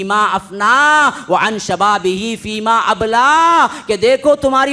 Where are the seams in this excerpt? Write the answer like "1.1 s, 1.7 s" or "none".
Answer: none

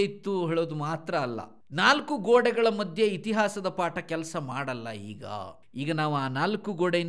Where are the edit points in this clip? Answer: 1.6 s, 5.6 s

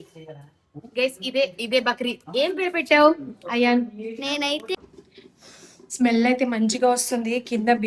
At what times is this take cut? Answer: 4.8 s

